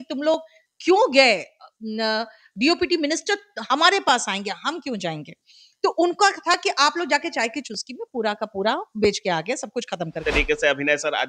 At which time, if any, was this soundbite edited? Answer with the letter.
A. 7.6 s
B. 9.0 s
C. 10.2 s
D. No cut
C